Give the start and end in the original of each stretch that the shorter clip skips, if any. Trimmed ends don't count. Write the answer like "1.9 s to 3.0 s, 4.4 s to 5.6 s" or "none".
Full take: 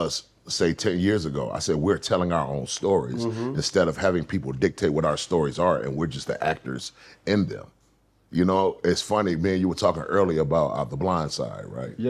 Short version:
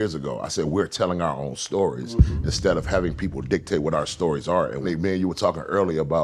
6.0 s to 9.2 s